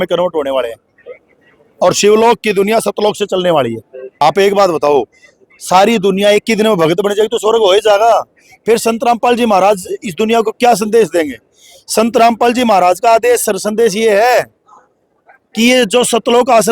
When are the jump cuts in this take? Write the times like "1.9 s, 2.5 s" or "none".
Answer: 4.2 s